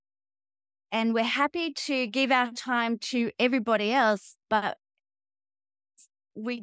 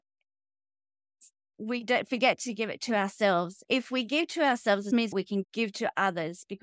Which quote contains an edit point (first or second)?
second